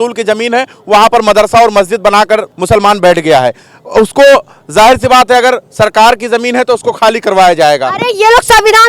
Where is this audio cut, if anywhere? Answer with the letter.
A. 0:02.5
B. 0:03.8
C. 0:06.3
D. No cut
A